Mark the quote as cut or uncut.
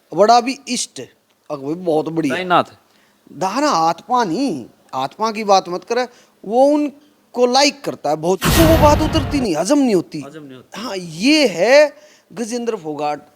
cut